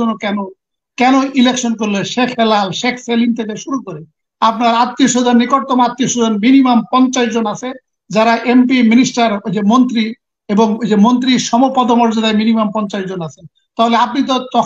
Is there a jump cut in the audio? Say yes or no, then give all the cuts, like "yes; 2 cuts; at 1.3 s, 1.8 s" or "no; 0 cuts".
no; 0 cuts